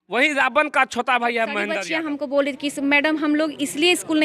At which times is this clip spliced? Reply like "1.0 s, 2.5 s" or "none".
1.8 s